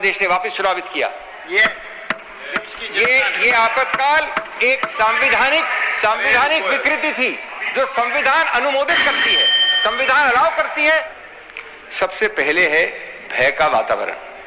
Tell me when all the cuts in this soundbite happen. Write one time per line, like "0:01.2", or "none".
0:11.1